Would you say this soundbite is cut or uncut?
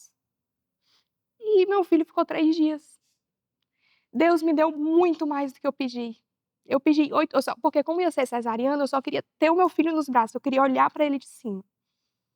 uncut